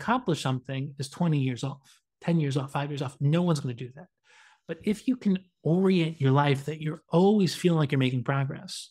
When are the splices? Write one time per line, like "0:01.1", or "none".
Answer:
none